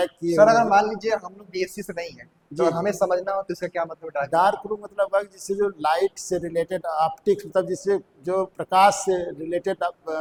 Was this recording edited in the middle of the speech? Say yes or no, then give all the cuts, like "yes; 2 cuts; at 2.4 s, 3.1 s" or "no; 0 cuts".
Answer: no; 0 cuts